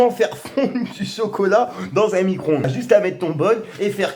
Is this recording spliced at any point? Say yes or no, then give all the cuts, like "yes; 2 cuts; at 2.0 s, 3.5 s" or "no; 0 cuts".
yes; 1 cut; at 2.8 s